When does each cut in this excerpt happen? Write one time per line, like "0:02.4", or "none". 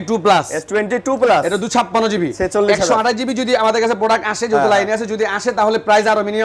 none